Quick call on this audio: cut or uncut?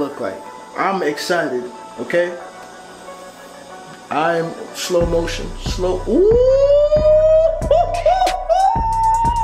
uncut